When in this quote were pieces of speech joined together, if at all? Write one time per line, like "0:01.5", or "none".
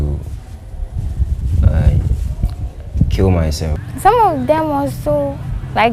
0:03.8